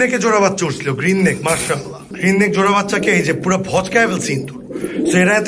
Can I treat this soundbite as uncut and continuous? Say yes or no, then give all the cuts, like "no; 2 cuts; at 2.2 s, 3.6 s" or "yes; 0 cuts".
yes; 0 cuts